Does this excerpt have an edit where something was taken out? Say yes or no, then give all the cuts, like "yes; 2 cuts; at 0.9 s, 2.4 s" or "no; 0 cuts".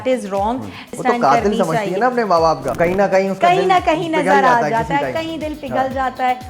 yes; 2 cuts; at 1.0 s, 2.7 s